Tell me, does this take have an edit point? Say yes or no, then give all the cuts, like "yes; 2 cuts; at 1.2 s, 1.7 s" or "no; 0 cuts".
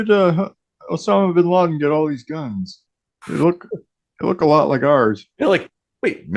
no; 0 cuts